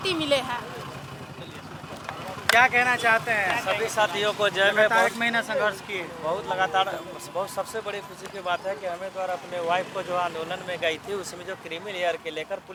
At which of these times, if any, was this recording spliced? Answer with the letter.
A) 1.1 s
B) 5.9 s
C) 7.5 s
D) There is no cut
D